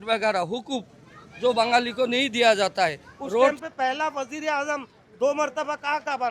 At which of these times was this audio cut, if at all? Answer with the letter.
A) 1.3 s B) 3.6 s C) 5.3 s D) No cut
B